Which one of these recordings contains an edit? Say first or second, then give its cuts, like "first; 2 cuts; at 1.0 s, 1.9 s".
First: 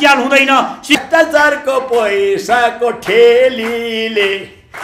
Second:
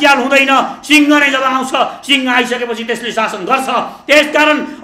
first; 1 cut; at 1.0 s